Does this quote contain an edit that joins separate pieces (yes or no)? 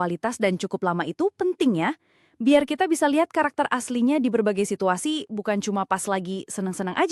no